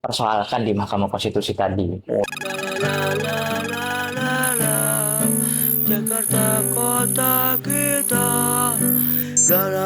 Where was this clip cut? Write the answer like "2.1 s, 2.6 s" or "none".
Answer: 2.3 s